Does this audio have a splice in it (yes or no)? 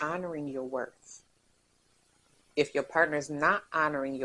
no